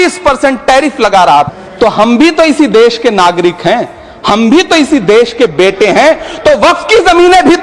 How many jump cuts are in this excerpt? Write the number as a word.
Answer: one